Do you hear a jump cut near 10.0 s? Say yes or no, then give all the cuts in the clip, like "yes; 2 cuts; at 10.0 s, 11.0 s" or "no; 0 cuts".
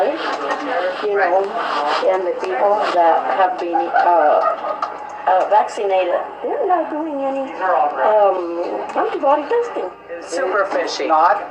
yes; 1 cut; at 10.0 s